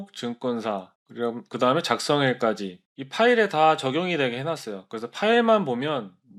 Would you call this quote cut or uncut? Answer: uncut